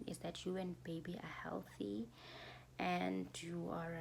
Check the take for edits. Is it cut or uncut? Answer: uncut